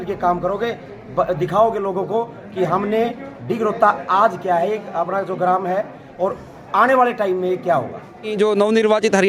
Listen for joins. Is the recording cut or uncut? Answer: cut